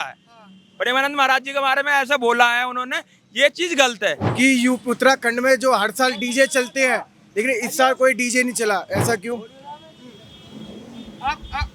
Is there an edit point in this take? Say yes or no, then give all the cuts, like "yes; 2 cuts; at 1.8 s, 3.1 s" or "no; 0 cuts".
yes; 1 cut; at 4.2 s